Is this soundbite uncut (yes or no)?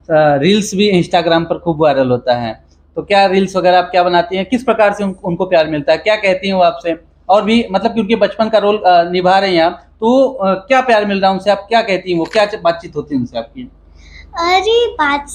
yes